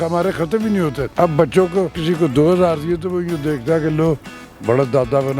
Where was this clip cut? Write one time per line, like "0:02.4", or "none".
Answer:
0:01.0
0:02.0

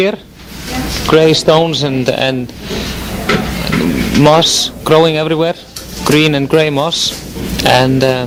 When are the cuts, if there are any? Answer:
none

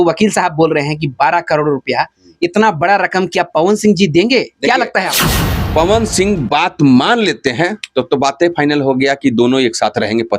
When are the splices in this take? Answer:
0:05.2

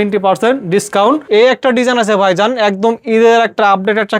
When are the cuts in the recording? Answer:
0:01.2

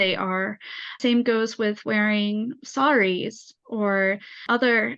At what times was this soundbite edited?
0:01.0

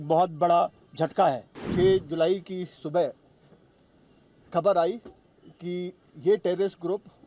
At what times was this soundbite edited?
0:01.5

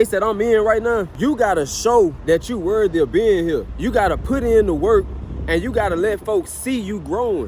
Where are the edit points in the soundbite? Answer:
0:01.1
0:02.2
0:03.7

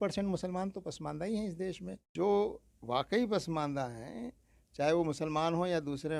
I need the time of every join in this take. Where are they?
0:01.9

